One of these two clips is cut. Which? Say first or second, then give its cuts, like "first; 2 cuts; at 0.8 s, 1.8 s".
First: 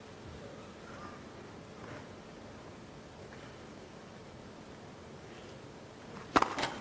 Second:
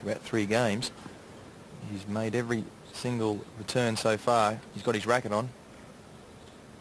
first; 1 cut; at 4.3 s